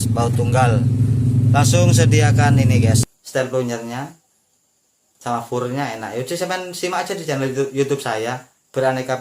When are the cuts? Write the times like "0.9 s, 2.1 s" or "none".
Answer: 3.0 s